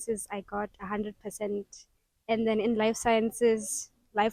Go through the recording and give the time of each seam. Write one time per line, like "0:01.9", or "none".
none

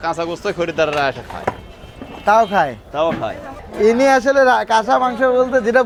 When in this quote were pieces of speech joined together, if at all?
none

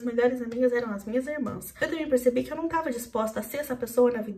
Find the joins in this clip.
0:01.6

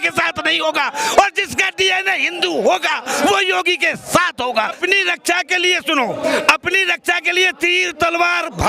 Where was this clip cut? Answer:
0:04.8

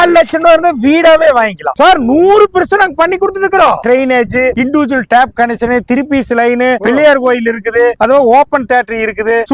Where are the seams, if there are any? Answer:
0:01.7
0:03.8

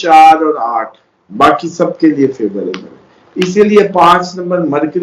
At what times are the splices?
0:01.2

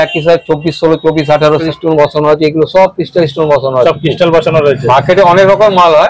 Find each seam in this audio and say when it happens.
0:01.6

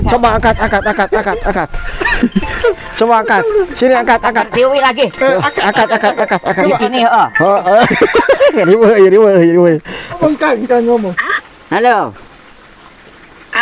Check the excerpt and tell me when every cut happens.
0:10.2

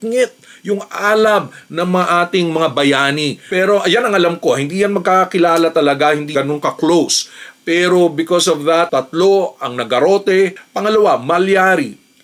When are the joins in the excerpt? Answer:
0:03.4
0:06.4
0:10.6

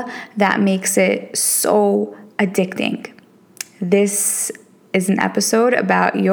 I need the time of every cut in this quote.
none

